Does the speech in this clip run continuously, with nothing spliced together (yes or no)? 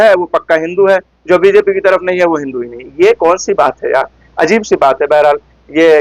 yes